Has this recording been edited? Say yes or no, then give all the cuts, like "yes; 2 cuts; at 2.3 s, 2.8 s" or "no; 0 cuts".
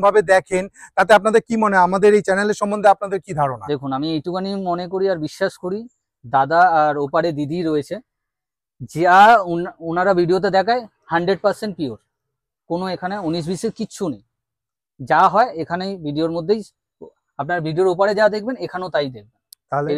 no; 0 cuts